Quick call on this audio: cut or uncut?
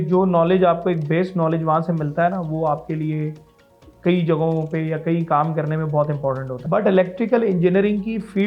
cut